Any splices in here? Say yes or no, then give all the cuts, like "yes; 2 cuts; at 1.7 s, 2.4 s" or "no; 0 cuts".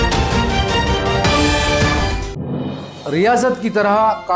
yes; 1 cut; at 2.8 s